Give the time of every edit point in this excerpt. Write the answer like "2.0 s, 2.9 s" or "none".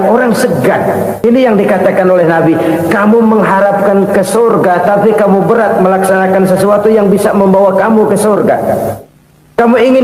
1.2 s